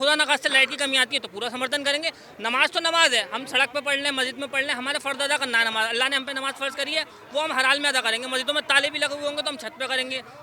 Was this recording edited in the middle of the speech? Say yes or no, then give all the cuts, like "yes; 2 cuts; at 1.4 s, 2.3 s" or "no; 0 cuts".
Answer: no; 0 cuts